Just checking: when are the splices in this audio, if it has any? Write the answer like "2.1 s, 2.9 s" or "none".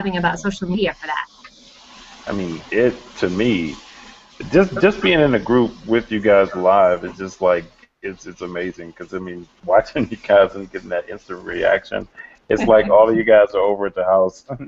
none